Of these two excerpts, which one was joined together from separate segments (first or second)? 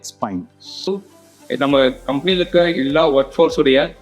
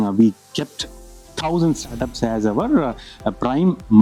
first